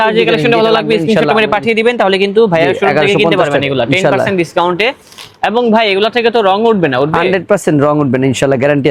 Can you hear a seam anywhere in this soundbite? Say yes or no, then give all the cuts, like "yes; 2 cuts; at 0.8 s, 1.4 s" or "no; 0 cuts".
no; 0 cuts